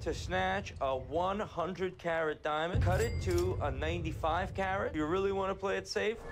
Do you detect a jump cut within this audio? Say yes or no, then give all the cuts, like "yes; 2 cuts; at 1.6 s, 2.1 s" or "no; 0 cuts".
no; 0 cuts